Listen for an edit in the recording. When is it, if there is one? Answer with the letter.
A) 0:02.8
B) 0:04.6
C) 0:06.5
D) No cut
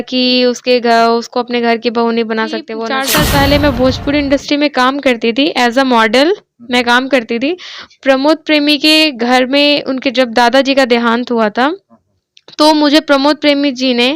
A